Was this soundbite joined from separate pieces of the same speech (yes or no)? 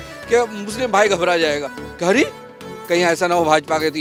no